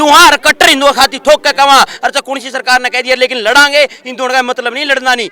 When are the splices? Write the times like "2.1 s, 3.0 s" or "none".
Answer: none